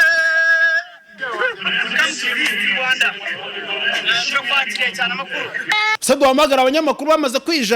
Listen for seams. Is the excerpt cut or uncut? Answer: cut